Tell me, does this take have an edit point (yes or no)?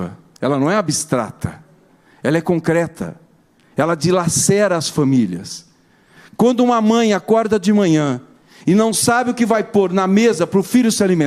no